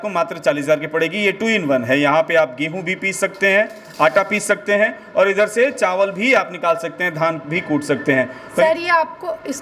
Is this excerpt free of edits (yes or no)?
no